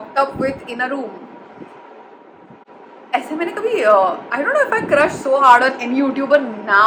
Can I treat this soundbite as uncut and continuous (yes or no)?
yes